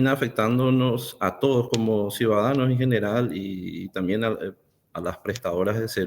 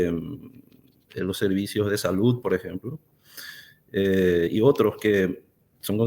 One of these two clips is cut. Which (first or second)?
first